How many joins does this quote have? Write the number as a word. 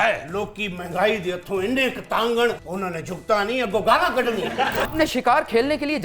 two